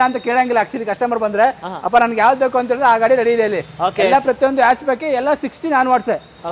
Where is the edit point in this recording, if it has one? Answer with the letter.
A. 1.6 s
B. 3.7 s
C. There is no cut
C